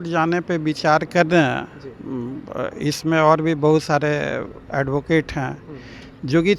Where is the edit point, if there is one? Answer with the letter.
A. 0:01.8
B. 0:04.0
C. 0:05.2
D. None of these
D